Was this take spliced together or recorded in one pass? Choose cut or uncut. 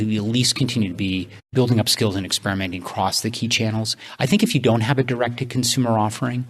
cut